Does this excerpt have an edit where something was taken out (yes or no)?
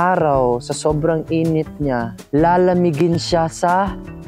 yes